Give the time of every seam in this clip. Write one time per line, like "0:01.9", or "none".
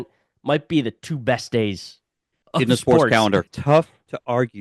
0:03.4